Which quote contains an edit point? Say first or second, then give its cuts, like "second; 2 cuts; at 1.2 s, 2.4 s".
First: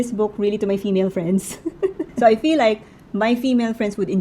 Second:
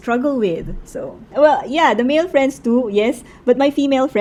first; 1 cut; at 2.0 s